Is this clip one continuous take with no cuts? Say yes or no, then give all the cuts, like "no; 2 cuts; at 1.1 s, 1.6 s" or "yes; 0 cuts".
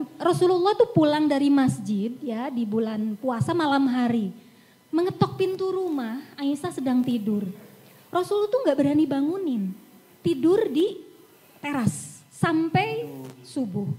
yes; 0 cuts